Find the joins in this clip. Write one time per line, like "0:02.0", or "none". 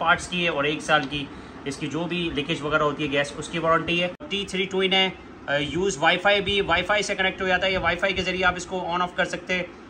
0:04.3